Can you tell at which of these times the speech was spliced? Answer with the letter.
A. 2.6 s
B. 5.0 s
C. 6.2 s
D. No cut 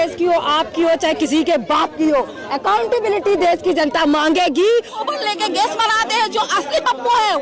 B